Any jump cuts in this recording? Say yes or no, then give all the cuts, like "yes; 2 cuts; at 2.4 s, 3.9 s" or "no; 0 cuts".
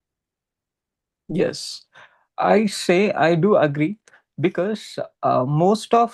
no; 0 cuts